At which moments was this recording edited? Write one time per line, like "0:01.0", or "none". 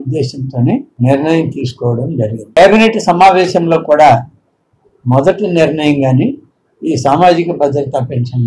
0:00.9
0:02.6

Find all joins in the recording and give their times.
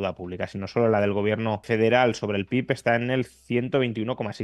0:01.6

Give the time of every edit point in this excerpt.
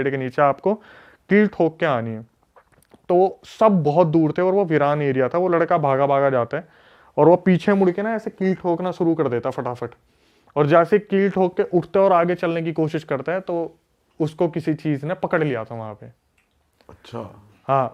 none

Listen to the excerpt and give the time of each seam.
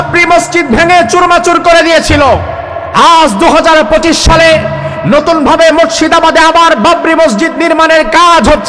none

